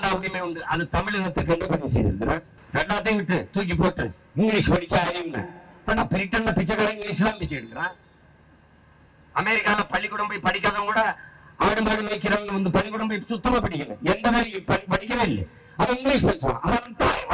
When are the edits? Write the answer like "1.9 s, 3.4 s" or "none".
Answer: 2.5 s